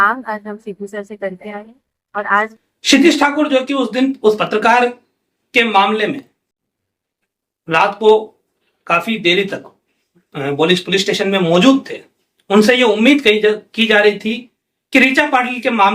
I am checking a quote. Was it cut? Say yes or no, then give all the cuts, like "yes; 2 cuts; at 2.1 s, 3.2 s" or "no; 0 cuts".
yes; 1 cut; at 2.5 s